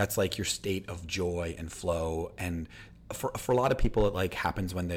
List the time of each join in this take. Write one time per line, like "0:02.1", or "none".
none